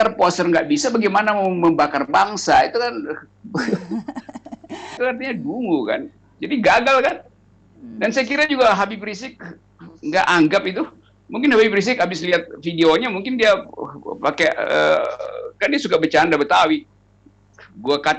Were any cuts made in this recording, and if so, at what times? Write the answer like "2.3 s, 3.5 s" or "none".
5.0 s

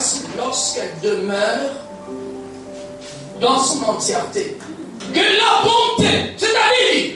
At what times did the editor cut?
5.0 s

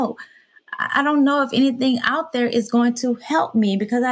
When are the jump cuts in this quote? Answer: none

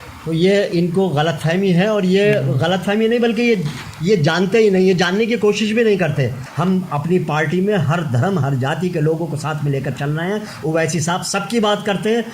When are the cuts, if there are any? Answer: 6.4 s

